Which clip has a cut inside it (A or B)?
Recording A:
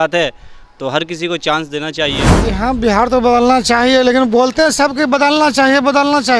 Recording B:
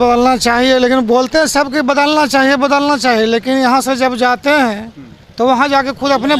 A